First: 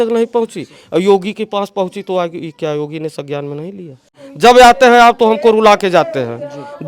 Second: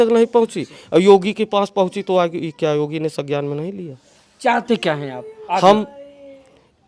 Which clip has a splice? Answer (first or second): first